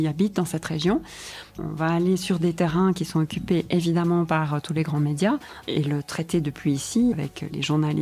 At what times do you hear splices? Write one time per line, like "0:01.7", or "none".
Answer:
0:01.5
0:05.6
0:07.1